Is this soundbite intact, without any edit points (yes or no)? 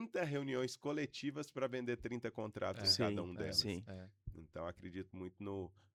yes